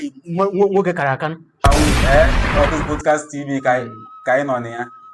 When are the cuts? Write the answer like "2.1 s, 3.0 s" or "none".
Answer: 1.7 s

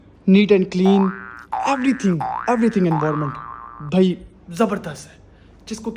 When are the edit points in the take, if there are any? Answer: none

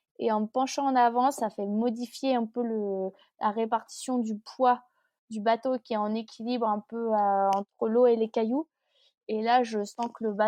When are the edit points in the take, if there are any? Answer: none

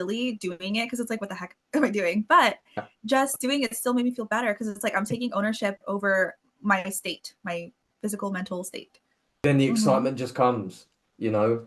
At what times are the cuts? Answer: 9.4 s

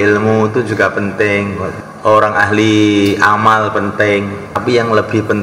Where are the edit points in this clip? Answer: 1.7 s, 4.6 s

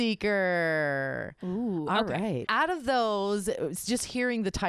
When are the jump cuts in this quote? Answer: 2.5 s

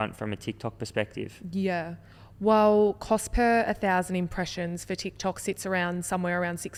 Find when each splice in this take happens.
none

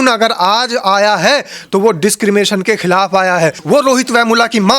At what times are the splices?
3.6 s

